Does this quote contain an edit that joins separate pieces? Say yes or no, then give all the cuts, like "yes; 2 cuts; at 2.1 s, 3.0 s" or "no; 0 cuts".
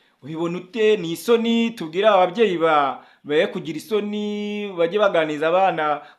no; 0 cuts